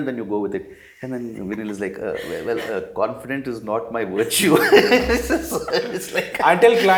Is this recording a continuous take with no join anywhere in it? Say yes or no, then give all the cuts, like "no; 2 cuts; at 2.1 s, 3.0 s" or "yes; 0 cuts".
yes; 0 cuts